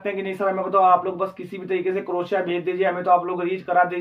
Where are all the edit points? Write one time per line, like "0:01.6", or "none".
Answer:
none